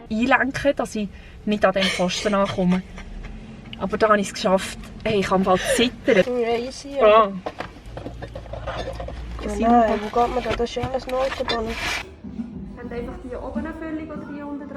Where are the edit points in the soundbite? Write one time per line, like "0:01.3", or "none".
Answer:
0:06.2
0:12.0